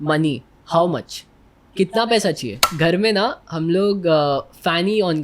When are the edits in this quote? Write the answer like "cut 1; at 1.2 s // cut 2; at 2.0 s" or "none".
cut 1; at 2.7 s